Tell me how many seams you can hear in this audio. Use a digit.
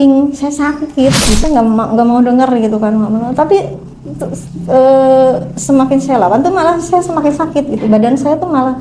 1